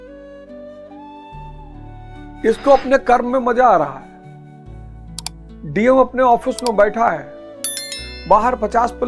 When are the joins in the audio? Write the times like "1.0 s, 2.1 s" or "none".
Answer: 2.4 s